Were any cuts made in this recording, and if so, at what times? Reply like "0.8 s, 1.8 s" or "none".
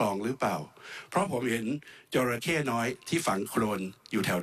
none